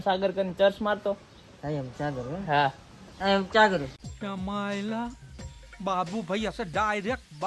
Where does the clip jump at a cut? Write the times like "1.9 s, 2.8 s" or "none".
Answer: none